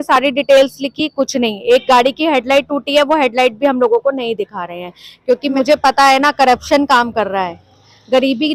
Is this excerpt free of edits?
yes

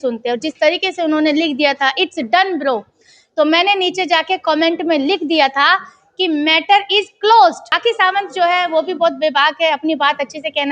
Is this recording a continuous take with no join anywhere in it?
no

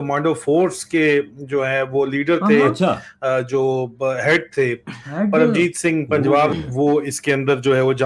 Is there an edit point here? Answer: yes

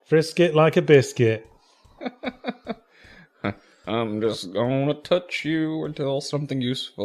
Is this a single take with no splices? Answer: yes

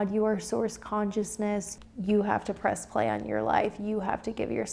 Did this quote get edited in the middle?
yes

